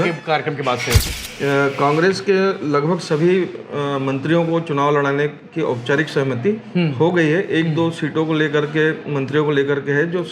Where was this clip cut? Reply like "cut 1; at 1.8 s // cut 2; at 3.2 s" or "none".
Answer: cut 1; at 1.0 s